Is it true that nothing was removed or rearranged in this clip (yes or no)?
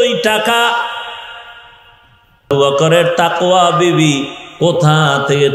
no